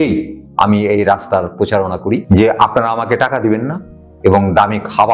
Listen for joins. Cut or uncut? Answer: cut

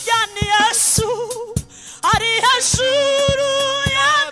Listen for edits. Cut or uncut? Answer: uncut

